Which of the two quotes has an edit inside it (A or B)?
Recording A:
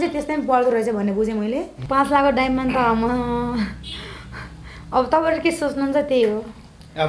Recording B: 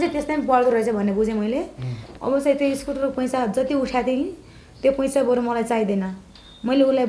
A